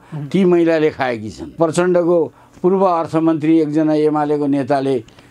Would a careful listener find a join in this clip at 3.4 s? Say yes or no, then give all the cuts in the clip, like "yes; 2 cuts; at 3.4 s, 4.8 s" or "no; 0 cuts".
no; 1 cut; at 1.6 s